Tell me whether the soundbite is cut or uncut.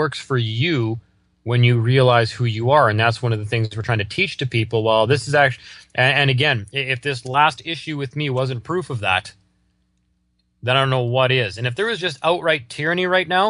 uncut